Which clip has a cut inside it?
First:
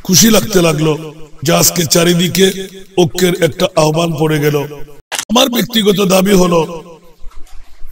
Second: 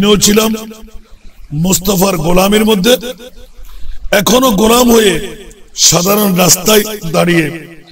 first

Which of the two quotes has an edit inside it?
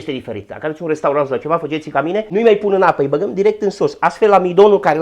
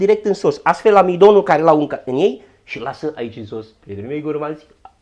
first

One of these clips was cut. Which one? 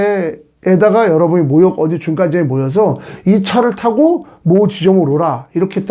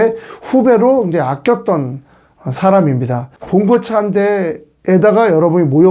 second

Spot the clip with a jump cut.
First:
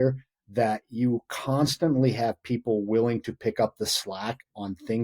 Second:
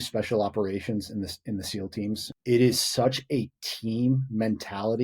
second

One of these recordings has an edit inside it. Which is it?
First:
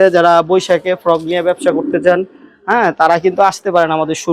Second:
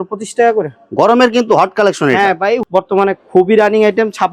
second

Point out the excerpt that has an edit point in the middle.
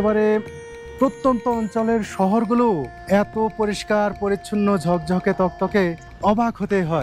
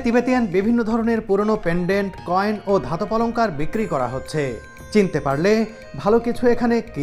first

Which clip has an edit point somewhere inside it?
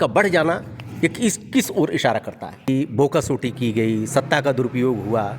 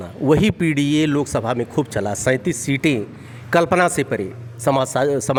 first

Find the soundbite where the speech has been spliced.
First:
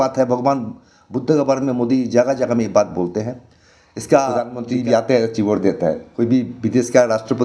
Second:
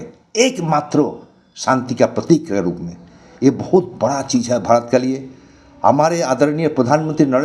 first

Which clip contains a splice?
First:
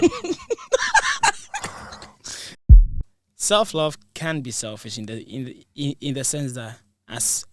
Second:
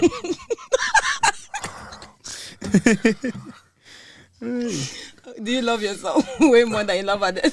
first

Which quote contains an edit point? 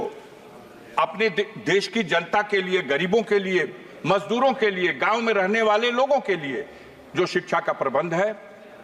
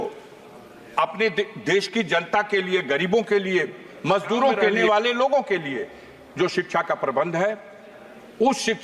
second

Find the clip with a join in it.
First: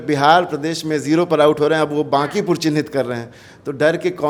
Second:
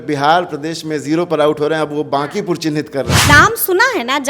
second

